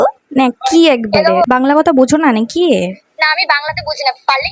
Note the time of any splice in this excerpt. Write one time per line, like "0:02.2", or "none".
0:01.5